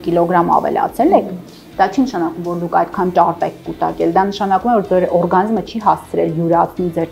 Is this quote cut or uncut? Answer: uncut